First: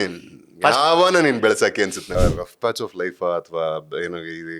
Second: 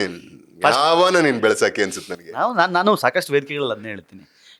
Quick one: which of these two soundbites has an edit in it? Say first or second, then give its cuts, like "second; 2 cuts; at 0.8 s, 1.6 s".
first; 1 cut; at 2.2 s